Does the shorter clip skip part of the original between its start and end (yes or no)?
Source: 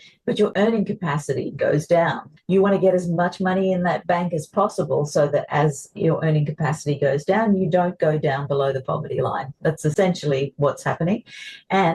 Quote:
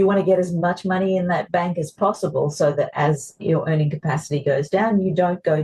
no